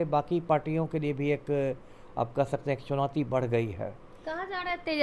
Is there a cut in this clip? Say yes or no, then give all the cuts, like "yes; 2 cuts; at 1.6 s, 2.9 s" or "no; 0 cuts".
no; 0 cuts